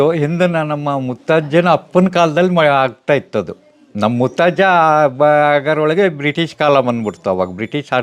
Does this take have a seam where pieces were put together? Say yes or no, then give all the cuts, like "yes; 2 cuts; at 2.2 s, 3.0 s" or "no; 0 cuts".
no; 0 cuts